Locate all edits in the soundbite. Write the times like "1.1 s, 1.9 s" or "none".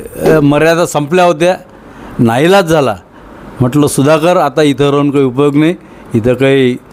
none